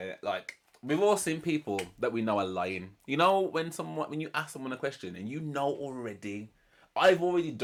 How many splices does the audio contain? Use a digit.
0